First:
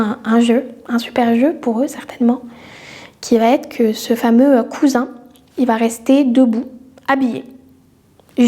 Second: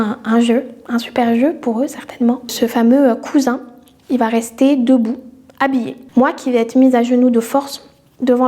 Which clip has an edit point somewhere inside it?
second; 2 cuts; at 2.5 s, 6.0 s

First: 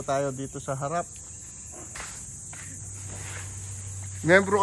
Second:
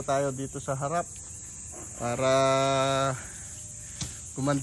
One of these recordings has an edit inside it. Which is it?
first; 1 cut; at 1.8 s

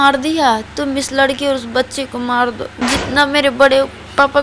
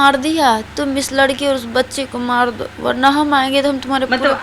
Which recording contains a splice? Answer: first; 1 cut; at 2.7 s

